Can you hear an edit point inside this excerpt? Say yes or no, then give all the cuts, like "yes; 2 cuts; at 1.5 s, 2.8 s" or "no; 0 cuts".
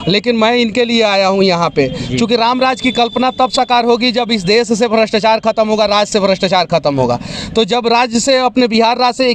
no; 0 cuts